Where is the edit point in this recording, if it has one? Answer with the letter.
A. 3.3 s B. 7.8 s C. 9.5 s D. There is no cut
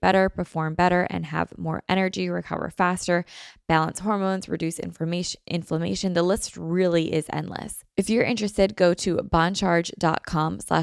B